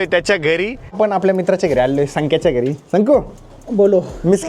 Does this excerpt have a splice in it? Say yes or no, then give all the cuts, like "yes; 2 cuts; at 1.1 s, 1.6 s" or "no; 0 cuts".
yes; 1 cut; at 0.9 s